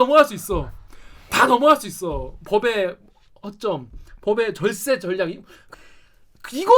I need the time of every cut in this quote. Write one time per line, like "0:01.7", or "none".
0:05.6